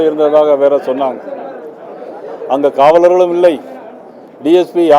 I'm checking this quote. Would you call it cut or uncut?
uncut